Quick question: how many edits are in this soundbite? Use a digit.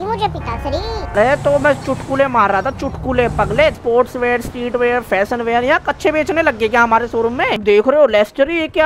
3